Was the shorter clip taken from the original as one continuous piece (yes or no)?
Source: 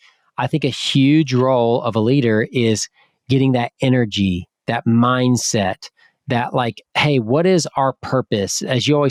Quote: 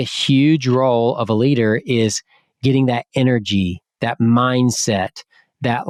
yes